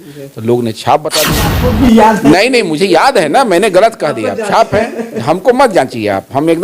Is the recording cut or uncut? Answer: cut